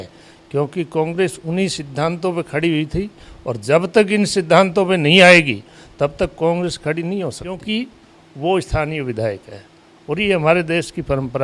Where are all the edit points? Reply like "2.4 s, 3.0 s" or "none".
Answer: 7.6 s